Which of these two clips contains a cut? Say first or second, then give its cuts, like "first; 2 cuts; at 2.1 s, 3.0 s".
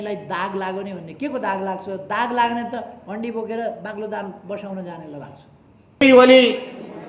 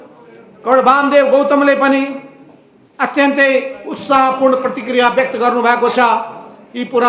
first; 1 cut; at 6.0 s